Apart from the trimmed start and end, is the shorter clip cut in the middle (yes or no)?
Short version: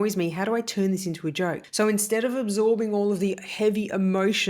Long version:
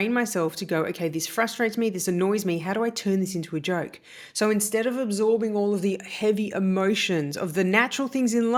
yes